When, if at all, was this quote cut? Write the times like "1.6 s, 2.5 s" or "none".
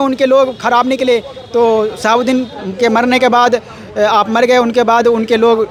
none

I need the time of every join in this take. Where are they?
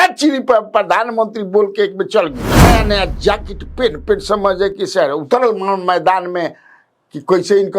2.7 s

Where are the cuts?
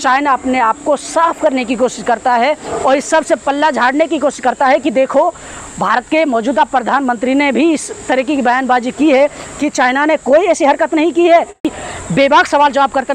11.7 s

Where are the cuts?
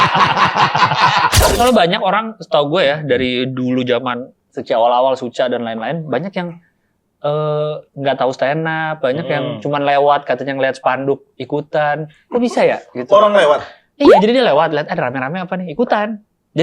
1.6 s

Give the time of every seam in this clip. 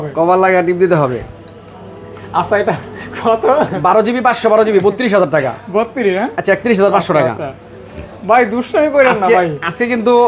none

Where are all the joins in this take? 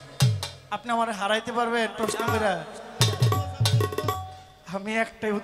none

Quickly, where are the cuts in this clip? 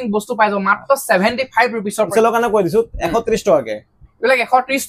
none

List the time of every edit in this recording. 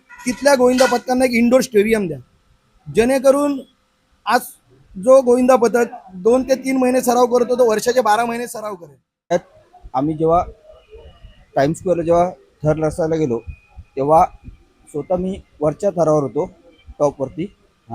9.3 s

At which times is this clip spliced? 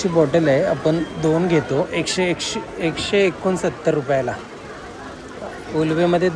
none

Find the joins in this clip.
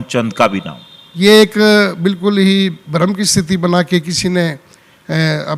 none

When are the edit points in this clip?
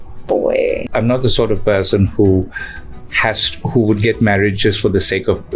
0.9 s

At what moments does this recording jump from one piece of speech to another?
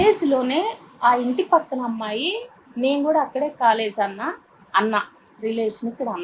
none

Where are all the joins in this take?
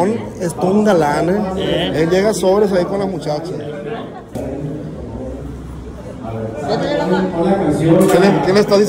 4.3 s

